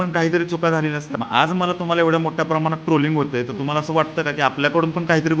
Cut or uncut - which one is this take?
cut